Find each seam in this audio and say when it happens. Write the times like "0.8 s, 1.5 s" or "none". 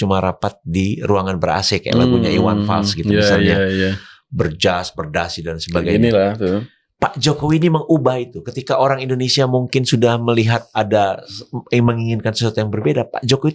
none